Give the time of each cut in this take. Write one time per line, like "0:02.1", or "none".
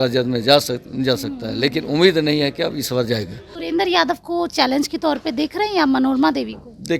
0:03.4